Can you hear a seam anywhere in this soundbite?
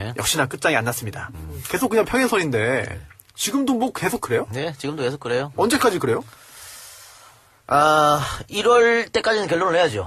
yes; 1 cut; at 4.2 s

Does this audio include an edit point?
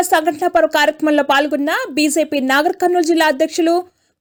no; 0 cuts

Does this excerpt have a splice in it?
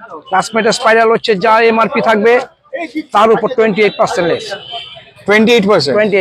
no; 0 cuts

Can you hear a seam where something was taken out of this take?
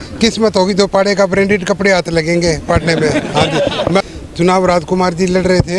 yes; 1 cut; at 4.0 s

